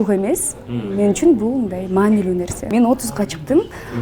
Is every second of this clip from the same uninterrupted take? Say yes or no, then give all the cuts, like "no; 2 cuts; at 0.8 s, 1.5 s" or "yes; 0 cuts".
no; 1 cut; at 2.6 s